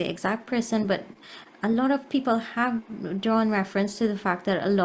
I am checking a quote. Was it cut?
no; 0 cuts

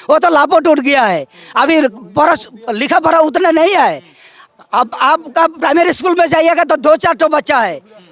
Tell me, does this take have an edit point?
no; 0 cuts

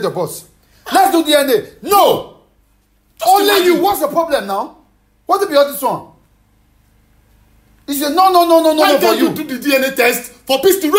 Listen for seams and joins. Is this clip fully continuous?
yes; 0 cuts

